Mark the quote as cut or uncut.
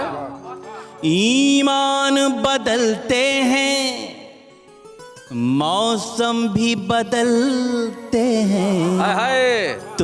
uncut